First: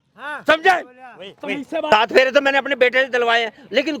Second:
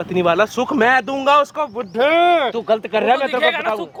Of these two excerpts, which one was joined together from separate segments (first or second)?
first